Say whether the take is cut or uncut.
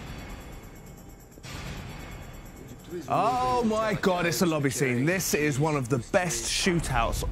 cut